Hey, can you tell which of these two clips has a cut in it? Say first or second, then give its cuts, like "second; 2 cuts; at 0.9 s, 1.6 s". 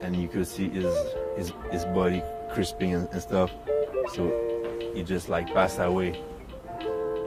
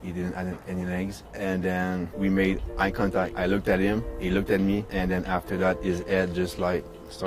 second; 4 cuts; at 1.2 s, 2.1 s, 3.3 s, 4.9 s